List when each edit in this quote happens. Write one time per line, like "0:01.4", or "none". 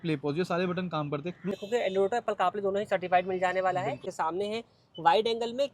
0:01.6
0:04.1